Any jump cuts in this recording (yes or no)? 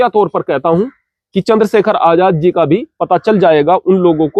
no